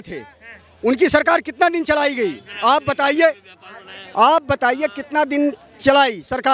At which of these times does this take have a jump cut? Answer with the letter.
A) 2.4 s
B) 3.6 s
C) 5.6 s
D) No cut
D